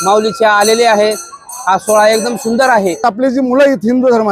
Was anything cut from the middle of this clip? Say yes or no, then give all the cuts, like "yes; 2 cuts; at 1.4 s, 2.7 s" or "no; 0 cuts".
yes; 1 cut; at 3.0 s